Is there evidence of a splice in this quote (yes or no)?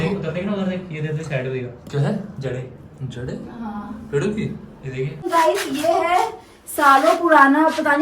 yes